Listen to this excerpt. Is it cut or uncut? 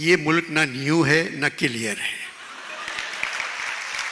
uncut